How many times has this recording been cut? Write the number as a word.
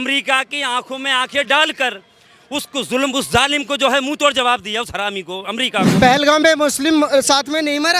one